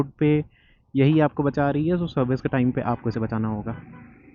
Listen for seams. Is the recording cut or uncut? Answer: uncut